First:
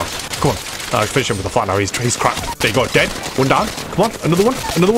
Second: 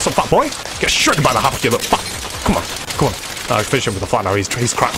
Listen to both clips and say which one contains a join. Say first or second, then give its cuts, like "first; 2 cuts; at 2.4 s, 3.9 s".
first; 1 cut; at 3.8 s